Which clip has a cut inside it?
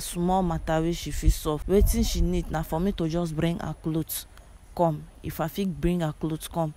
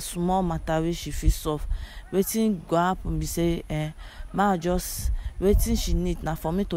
first; 1 cut; at 1.6 s

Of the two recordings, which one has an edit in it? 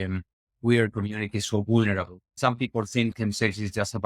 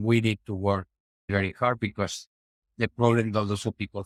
first; 1 cut; at 2.2 s

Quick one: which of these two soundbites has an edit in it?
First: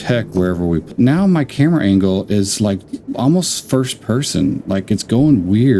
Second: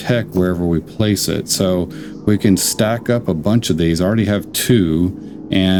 first; 1 cut; at 0.9 s

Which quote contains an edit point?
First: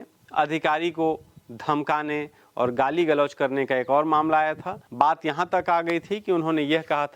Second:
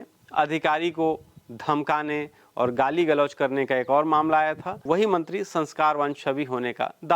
second; 1 cut; at 4.7 s

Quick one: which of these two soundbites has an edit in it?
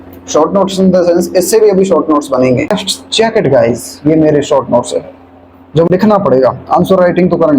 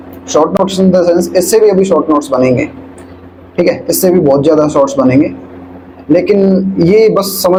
first; 2 cuts; at 2.7 s, 5.9 s

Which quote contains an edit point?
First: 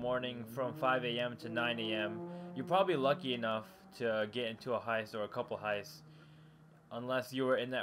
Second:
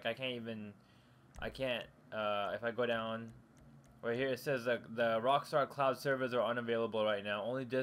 second; 1 cut; at 4.6 s

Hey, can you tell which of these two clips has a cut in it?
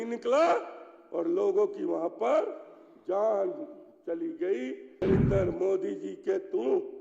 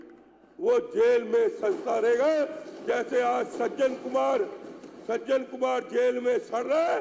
first; 1 cut; at 5.0 s

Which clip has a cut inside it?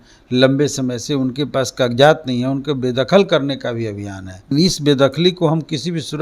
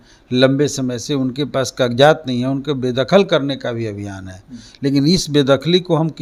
first; 1 cut; at 4.5 s

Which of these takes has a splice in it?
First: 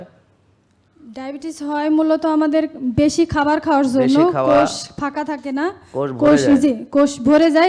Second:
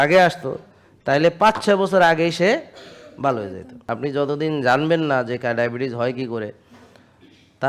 second; 1 cut; at 3.7 s

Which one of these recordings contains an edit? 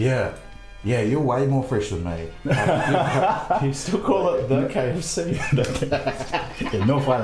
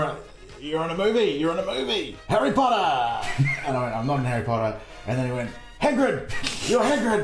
second; 2 cuts; at 2.1 s, 3.7 s

